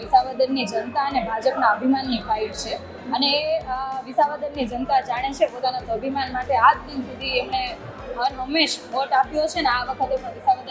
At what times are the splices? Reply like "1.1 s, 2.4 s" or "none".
none